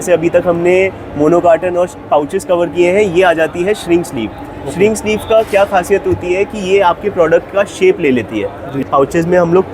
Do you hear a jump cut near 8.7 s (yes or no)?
yes